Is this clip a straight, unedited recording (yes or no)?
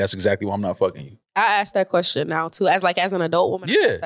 no